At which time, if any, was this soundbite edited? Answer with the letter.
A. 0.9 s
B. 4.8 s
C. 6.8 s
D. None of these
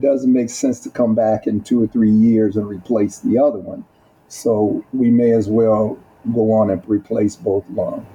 C